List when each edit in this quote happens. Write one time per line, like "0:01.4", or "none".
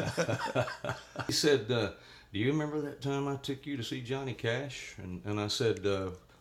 0:01.4